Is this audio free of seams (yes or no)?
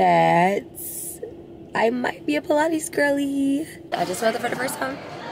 no